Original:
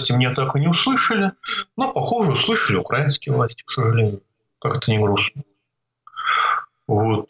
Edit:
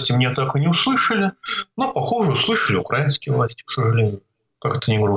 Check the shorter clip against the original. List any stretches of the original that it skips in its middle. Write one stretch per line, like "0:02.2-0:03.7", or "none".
none